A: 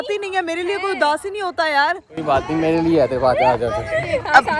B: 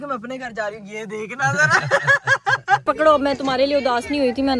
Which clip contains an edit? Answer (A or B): B